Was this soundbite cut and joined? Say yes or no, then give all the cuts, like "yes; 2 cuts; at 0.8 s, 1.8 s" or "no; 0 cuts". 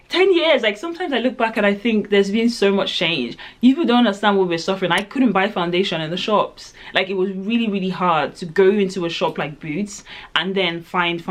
no; 0 cuts